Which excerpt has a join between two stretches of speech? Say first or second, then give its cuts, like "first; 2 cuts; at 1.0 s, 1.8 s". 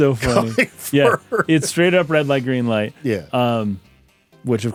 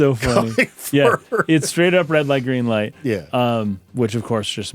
second; 1 cut; at 3.8 s